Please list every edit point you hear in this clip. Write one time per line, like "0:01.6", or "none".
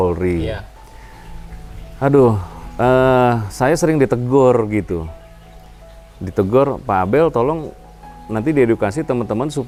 none

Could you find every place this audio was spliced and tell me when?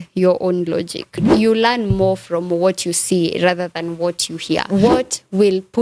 0:01.3
0:04.6

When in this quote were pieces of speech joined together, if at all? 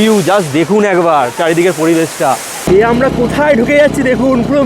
0:02.7

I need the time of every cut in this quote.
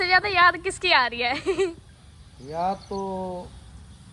none

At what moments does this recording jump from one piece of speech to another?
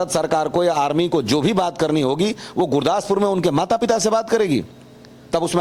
none

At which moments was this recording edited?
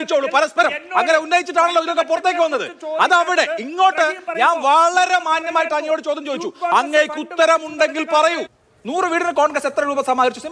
0:08.5

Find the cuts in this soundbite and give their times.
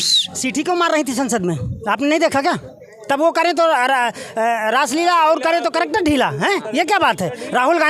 none

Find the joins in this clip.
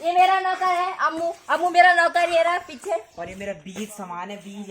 0:03.2

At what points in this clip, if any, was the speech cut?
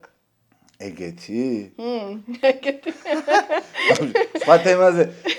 0:02.4

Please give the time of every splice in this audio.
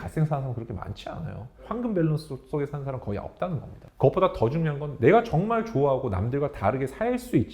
0:01.7
0:03.8

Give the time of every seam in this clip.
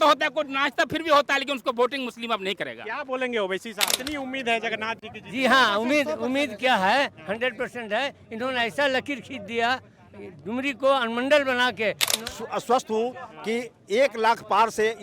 0:04.0
0:12.1

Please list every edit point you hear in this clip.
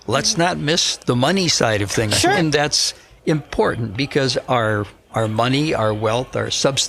0:00.9
0:02.4

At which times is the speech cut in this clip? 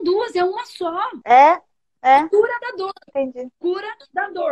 0:01.1

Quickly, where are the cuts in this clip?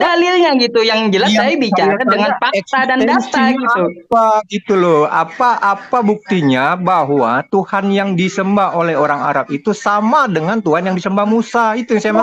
none

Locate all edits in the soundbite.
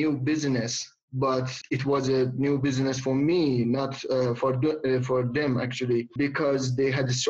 none

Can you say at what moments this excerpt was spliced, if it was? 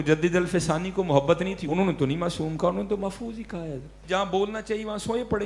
0:01.6
0:04.0

